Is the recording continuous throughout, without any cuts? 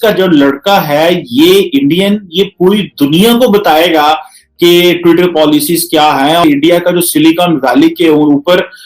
no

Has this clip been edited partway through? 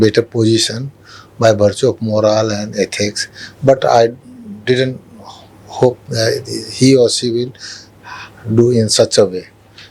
no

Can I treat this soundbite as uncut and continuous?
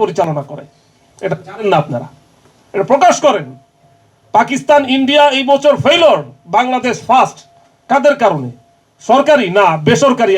yes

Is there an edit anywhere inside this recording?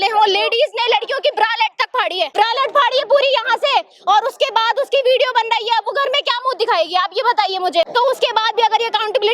yes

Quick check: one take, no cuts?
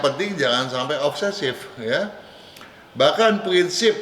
yes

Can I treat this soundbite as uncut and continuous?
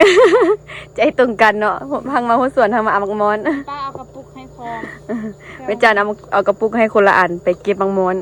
yes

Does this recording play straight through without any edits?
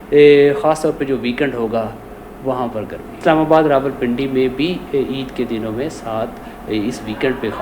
no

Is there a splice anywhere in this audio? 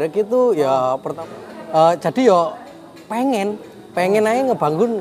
yes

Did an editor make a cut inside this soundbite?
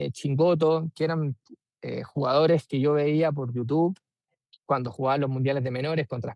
no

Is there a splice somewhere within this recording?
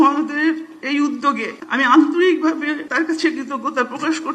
yes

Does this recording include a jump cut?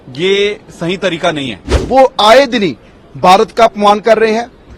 yes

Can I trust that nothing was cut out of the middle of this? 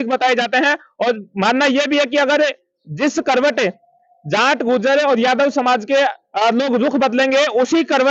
yes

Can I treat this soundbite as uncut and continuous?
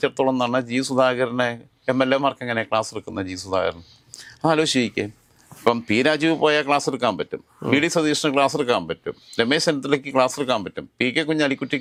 yes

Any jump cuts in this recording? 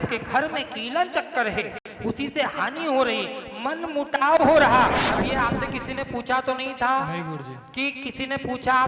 yes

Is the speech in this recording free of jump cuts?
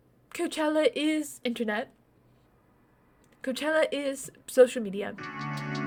yes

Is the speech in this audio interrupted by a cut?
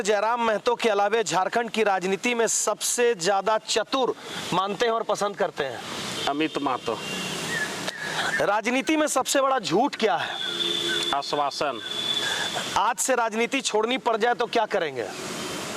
no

